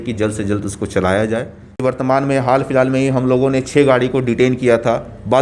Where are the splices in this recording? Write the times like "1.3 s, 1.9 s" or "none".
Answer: 1.8 s